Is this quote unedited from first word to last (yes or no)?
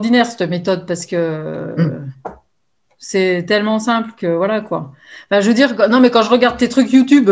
yes